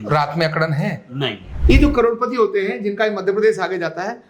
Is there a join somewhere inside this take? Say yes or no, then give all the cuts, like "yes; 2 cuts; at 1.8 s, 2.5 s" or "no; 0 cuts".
yes; 1 cut; at 1.5 s